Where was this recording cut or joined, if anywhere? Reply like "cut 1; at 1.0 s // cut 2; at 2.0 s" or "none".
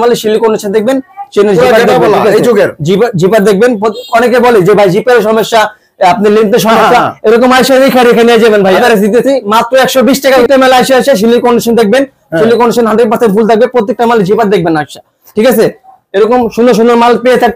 cut 1; at 8.8 s // cut 2; at 10.5 s